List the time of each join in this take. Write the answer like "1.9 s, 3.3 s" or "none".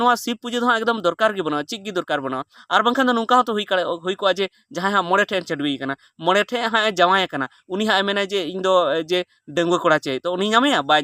none